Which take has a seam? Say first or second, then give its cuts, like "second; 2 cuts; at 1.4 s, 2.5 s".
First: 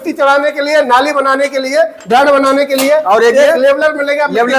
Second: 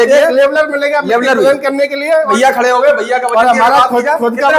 second; 1 cut; at 2.3 s